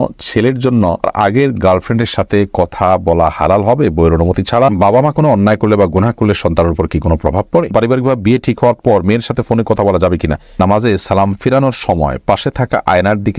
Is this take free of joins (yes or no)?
no